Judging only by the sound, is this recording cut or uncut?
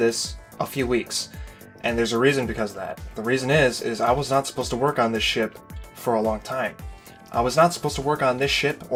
uncut